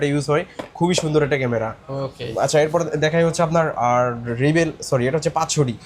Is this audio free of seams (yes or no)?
yes